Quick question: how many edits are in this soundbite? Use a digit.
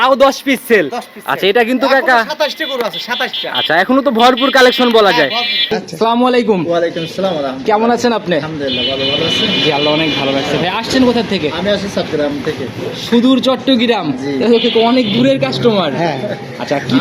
1